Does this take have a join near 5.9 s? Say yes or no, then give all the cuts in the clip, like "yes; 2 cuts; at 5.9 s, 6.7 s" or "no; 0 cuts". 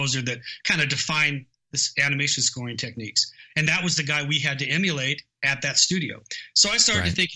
no; 0 cuts